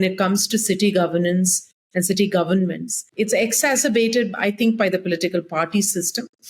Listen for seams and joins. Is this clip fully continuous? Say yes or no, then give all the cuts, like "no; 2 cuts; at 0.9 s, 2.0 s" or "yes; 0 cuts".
no; 1 cut; at 3.0 s